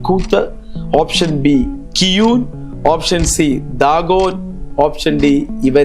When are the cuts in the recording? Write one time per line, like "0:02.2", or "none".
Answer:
none

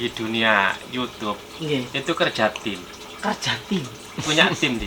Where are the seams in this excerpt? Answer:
none

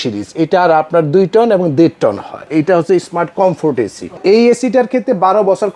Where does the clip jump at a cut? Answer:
0:02.5
0:04.2

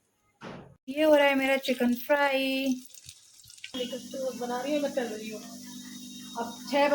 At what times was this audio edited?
0:00.8
0:03.8

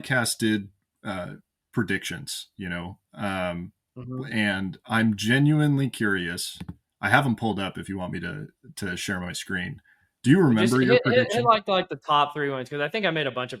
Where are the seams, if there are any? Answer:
none

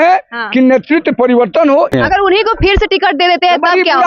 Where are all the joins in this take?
0:01.9

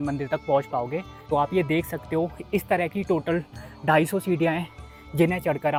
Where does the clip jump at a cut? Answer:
none

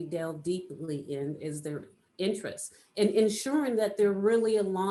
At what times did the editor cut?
none

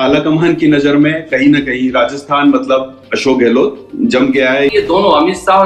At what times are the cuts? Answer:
0:04.7

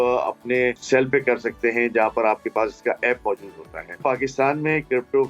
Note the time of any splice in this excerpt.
0:00.8
0:04.0

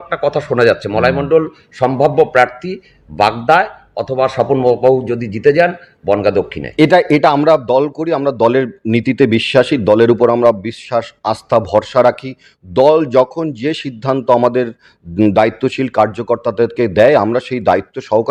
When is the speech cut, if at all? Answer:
none

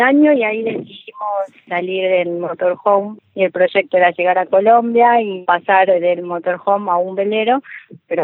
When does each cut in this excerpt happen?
0:01.6
0:03.2
0:05.4

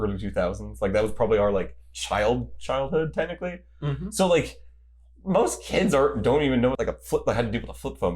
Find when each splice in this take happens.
0:06.8

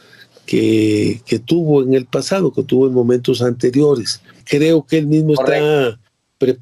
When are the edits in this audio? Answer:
0:04.4

